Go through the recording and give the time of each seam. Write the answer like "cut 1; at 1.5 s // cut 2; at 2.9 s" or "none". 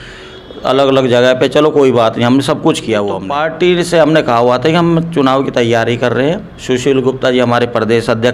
cut 1; at 3.4 s